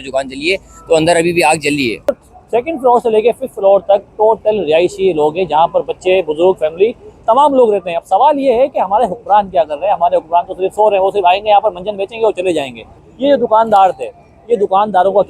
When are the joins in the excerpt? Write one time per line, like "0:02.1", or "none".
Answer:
0:02.1
0:07.9
0:13.0